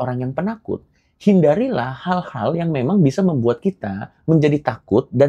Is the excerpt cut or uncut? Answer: uncut